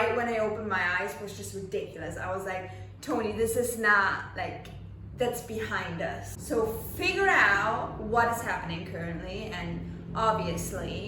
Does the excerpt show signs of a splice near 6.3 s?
no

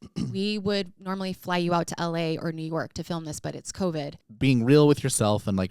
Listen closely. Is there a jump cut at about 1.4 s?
no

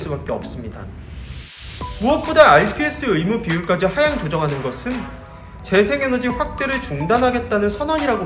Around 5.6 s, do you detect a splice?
no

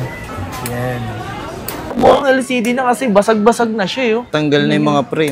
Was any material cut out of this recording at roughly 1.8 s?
yes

